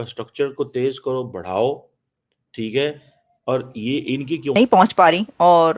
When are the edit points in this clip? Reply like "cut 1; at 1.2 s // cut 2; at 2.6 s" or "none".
cut 1; at 4.5 s